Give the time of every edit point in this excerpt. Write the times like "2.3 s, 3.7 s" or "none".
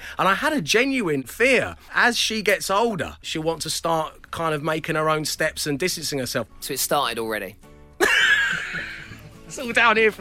1.5 s, 3.2 s, 6.6 s